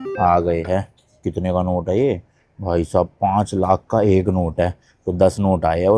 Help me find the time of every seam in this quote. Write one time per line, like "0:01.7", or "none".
none